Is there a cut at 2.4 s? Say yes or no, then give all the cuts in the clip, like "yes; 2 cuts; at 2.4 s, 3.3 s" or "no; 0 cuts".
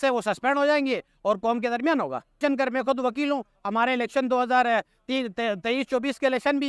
yes; 1 cut; at 2.4 s